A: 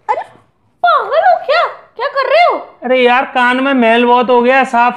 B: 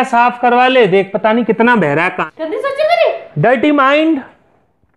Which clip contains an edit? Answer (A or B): B